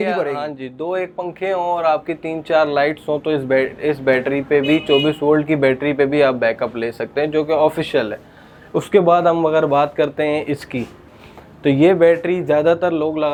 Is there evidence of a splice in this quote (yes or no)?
no